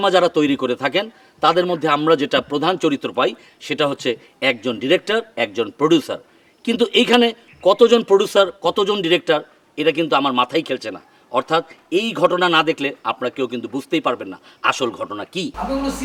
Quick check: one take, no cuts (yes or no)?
yes